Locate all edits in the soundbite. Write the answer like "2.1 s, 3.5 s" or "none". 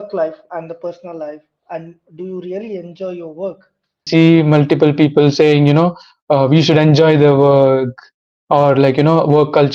4.1 s